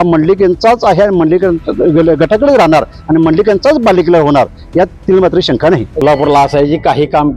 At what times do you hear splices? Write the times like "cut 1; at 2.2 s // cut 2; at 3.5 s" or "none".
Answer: cut 1; at 6.0 s